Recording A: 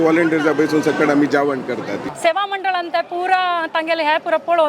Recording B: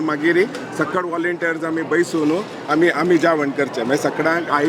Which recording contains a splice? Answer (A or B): A